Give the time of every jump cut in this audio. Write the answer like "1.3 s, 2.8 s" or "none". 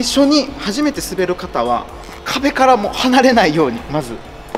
none